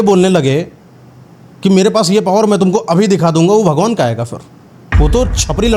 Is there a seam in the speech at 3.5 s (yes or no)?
no